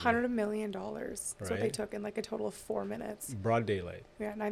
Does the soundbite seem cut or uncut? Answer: uncut